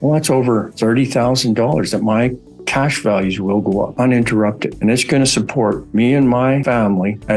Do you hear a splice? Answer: no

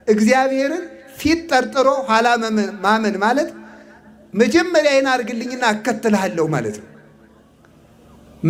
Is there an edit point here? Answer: no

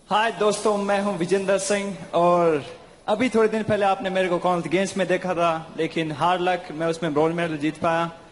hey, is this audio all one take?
yes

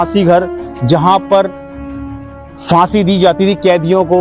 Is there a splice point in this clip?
no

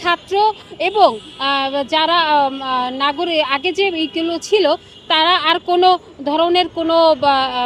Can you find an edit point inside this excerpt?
no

